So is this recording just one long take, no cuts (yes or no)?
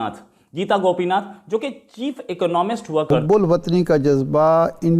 no